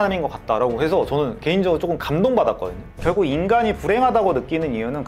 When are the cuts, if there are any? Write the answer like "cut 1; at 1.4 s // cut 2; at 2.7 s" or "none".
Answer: cut 1; at 3.0 s

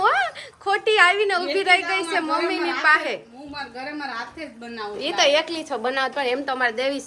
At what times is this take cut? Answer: none

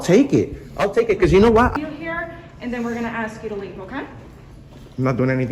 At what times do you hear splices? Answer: cut 1; at 1.7 s

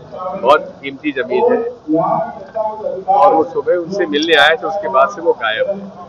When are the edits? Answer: none

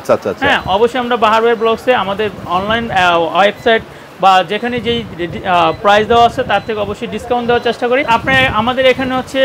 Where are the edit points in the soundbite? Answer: cut 1; at 8.1 s

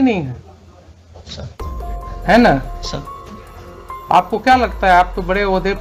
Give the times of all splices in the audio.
none

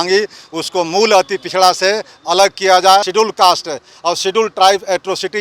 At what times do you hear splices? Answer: cut 1; at 3.1 s

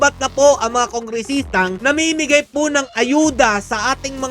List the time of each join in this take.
cut 1; at 1.8 s

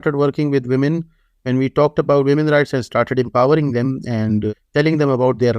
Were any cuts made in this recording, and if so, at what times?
cut 1; at 4.5 s

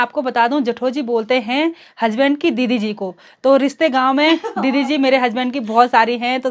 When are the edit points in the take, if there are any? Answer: none

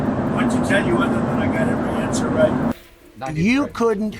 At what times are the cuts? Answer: cut 1; at 2.9 s

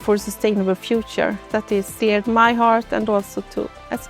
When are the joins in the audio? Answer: cut 1; at 1.9 s

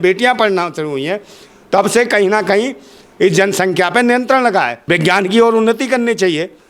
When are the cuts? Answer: cut 1; at 4.8 s

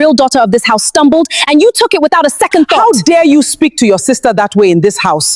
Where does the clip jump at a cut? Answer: cut 1; at 2.8 s

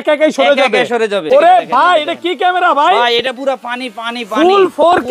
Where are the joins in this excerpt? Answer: cut 1; at 1.2 s

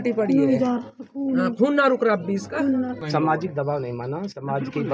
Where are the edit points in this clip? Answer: cut 1; at 3.0 s

